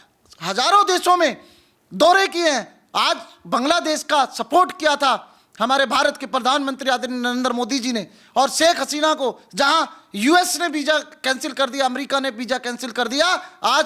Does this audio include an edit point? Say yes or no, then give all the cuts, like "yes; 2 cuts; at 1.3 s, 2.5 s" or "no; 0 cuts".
no; 0 cuts